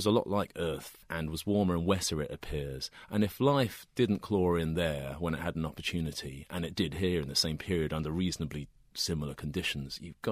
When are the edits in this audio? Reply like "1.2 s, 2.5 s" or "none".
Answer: 1.0 s